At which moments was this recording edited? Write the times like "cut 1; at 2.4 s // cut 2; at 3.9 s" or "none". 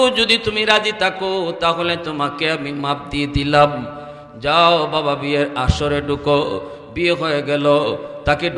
none